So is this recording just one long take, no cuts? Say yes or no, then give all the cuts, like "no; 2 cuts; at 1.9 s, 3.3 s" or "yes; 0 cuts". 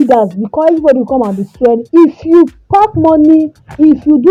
yes; 0 cuts